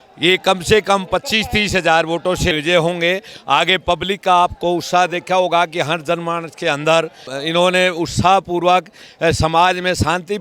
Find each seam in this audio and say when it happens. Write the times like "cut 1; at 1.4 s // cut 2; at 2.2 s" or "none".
cut 1; at 2.5 s // cut 2; at 7.3 s